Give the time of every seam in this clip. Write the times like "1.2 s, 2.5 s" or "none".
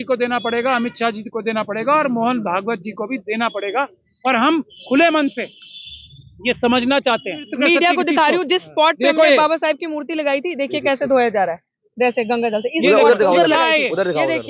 7.5 s